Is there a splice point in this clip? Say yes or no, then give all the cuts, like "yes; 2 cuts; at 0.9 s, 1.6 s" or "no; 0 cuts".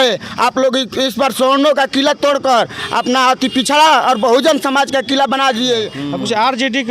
yes; 1 cut; at 6.0 s